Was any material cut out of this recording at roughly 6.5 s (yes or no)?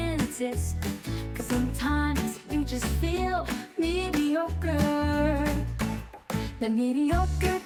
no